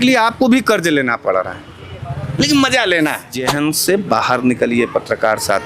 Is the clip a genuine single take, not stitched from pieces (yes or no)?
no